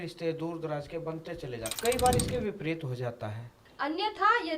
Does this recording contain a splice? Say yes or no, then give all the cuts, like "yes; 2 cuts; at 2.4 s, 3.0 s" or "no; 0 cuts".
yes; 2 cuts; at 1.7 s, 3.6 s